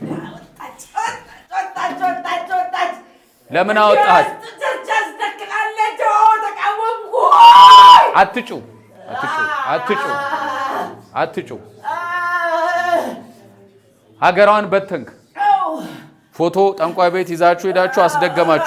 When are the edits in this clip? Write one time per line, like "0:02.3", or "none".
none